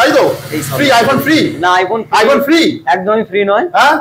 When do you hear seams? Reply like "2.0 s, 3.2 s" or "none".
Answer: none